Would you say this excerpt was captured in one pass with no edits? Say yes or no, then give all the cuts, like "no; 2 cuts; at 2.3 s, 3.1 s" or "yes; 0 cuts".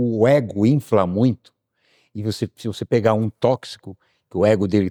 yes; 0 cuts